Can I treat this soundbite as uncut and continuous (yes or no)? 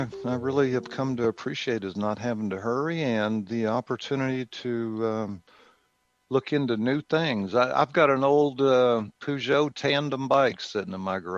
yes